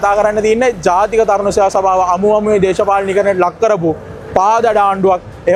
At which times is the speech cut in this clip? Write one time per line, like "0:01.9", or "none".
none